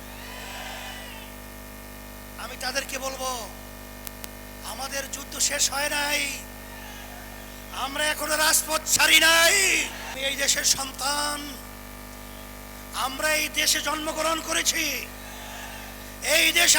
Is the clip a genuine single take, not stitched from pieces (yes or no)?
no